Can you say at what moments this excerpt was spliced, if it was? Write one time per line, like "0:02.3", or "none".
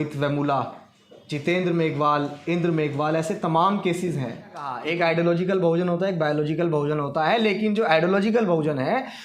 0:04.8